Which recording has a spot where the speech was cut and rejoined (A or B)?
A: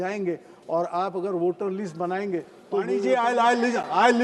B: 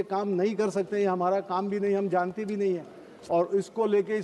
A